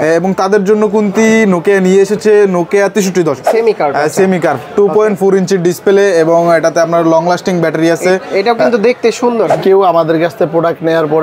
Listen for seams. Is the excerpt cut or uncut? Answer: cut